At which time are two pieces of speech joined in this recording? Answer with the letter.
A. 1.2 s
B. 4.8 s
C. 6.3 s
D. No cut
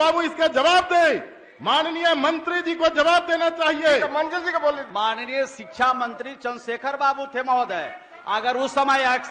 B